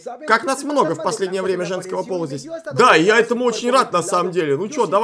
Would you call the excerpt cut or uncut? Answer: uncut